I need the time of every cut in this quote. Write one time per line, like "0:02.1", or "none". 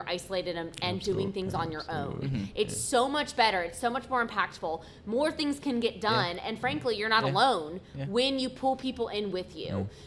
none